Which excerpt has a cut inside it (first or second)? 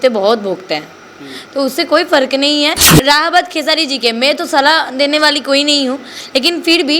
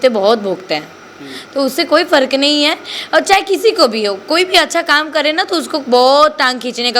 first